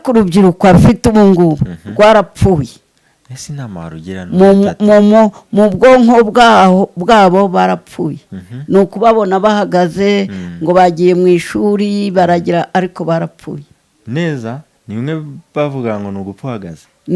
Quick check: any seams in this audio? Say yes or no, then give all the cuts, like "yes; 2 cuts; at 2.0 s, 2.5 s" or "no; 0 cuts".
no; 0 cuts